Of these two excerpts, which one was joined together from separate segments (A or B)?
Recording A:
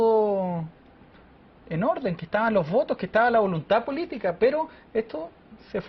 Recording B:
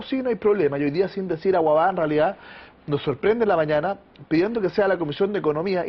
A